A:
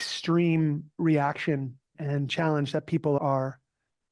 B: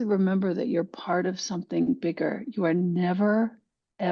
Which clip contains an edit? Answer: A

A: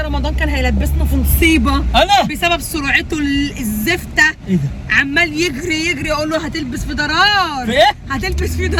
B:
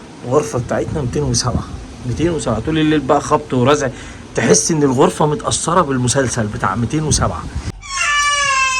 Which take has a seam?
B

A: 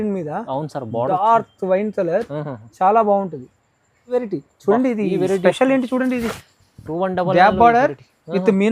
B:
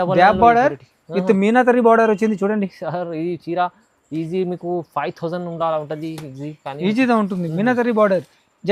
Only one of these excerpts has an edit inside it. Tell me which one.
A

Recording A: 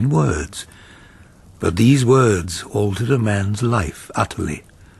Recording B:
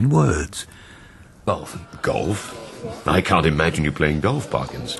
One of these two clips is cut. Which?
A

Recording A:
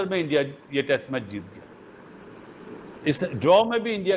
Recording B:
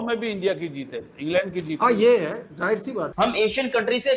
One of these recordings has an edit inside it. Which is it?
B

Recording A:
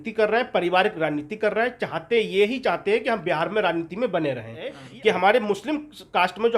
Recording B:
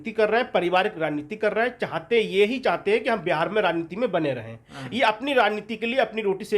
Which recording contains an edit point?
A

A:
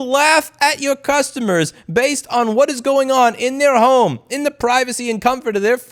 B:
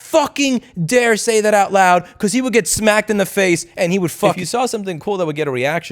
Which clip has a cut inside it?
B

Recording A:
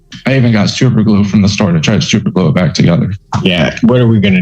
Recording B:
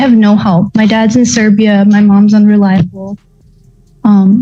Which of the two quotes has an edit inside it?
A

